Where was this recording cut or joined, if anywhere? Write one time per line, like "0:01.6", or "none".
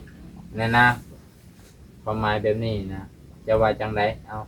none